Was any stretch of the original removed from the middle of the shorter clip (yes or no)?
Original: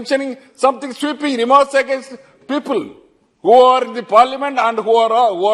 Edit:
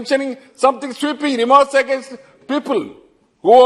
no